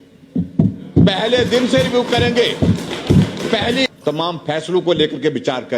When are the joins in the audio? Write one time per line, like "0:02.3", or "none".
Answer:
0:03.9